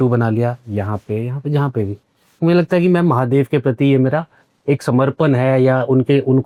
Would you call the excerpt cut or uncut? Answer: uncut